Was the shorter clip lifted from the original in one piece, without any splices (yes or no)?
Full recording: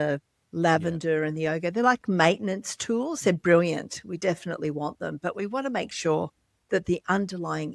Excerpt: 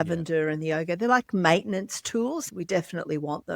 no